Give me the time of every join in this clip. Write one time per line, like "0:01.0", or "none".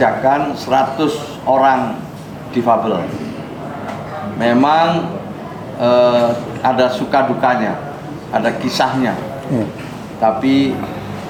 none